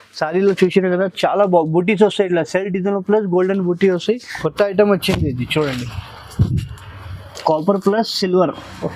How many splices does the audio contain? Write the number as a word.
one